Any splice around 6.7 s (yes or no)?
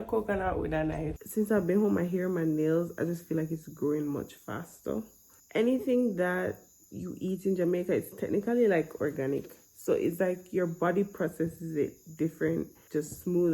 no